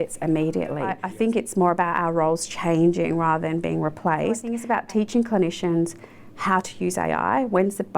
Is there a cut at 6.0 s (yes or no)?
no